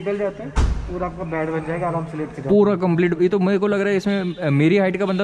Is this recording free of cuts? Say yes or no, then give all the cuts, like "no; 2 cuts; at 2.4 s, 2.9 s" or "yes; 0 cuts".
yes; 0 cuts